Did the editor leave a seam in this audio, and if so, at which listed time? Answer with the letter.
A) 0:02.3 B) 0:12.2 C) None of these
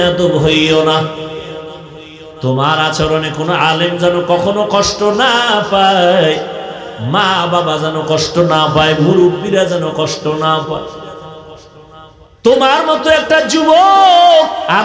B